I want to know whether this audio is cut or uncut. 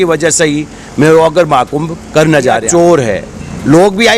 cut